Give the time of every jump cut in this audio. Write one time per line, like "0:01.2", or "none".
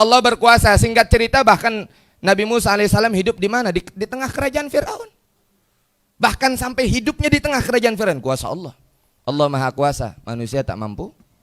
none